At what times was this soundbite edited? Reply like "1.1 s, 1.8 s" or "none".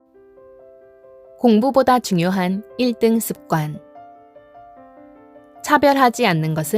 1.0 s